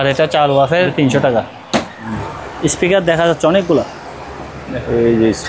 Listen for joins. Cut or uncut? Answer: cut